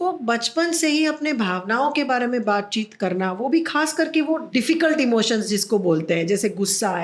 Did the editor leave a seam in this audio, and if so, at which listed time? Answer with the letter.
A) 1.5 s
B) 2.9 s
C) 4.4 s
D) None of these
C